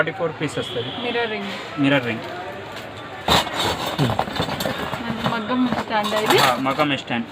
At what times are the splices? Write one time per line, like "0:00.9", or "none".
0:03.1